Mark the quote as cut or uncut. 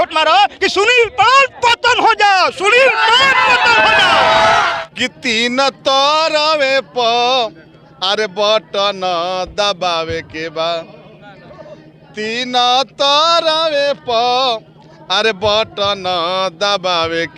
cut